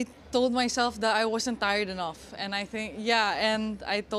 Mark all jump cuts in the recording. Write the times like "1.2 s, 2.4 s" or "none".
none

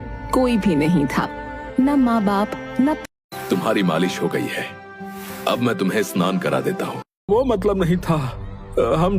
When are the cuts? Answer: 3.0 s, 7.3 s

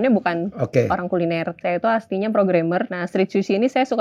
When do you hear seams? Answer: 1.5 s, 3.0 s

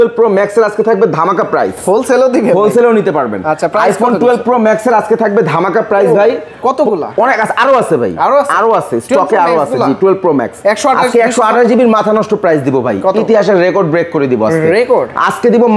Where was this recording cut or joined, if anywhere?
none

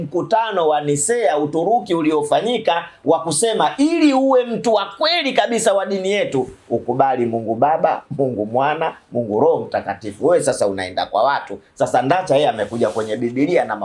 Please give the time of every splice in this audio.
none

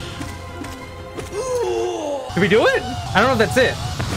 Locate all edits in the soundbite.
2.3 s, 3.0 s

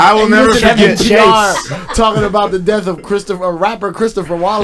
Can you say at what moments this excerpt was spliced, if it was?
1.8 s

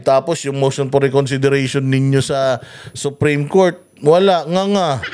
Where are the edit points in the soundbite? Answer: none

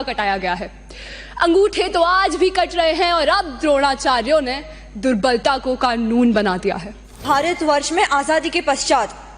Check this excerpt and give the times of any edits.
7.2 s

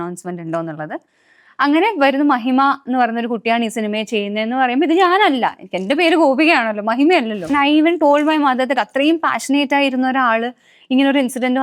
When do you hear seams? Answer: 7.5 s

